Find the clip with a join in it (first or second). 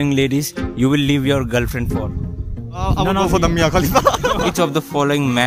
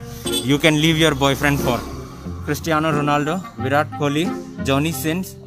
first